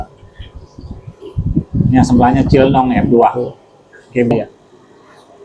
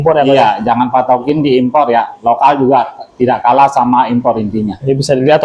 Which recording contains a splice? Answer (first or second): first